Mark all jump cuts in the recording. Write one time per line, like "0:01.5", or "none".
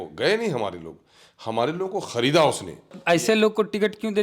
0:03.0

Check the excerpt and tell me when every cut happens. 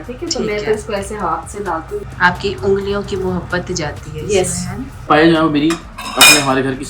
0:02.1
0:05.1

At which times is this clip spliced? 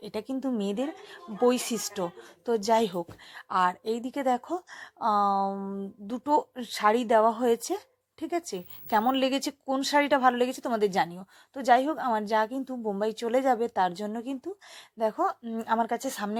none

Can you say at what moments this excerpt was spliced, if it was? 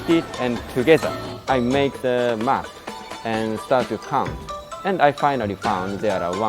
0:01.4

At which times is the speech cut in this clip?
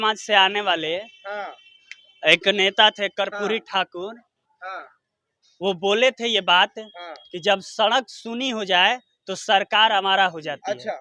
none

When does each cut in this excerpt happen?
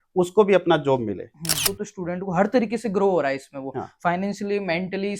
0:01.6

